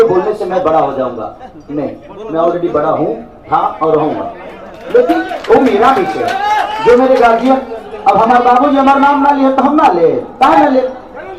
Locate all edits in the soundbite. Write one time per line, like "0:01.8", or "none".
none